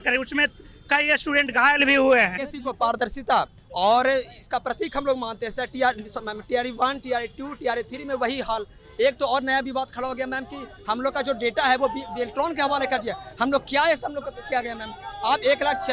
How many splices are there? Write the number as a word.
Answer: one